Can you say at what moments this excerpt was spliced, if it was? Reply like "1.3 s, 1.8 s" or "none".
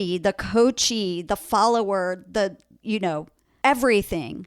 3.1 s